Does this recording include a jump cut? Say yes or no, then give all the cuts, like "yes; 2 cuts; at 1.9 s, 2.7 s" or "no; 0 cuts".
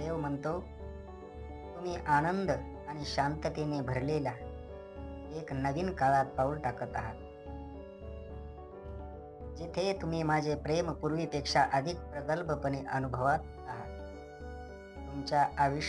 yes; 2 cuts; at 7.1 s, 9.4 s